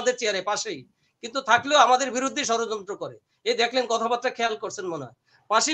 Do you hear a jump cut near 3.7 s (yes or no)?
no